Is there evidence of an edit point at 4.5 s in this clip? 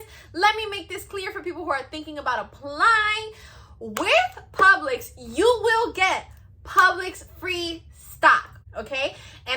no; 1 cut; at 8.6 s

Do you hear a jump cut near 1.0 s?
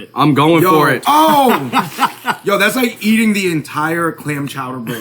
yes; 1 cut; at 1.0 s

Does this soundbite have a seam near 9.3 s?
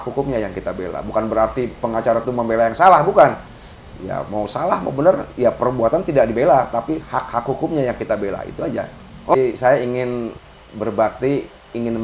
yes; 1 cut; at 9.3 s

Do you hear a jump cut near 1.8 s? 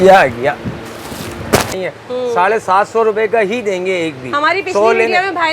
yes; 1 cut; at 1.8 s

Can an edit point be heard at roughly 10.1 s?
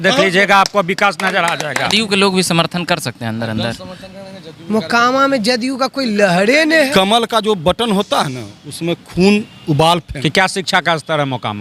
yes; 3 cuts; at 1.9 s, 6.9 s, 10.1 s

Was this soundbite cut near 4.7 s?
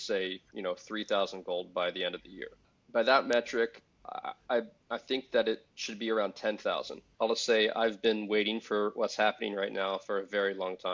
no; 2 cuts; at 2.7 s, 7.1 s

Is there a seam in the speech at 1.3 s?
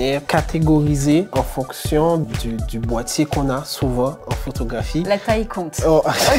yes; 2 cuts; at 1.3 s, 4.2 s

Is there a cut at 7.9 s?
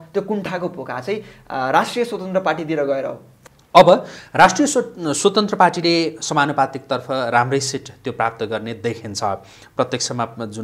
no; 1 cut; at 3.3 s

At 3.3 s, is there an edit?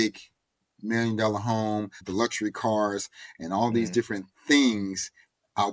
no; 1 cut; at 2.0 s

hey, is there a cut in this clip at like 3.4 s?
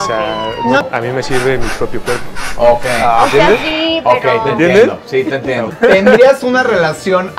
no; 2 cuts; at 0.8 s, 5.7 s

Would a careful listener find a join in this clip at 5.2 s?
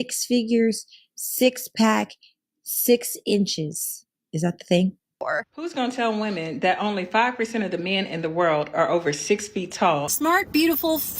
yes; 2 cuts; at 5.2 s, 10.1 s

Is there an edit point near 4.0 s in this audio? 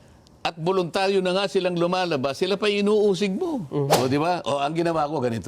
yes; 1 cut; at 4.0 s

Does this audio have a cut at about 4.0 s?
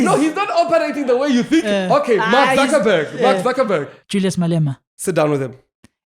yes; 2 cuts; at 4.0 s, 4.9 s

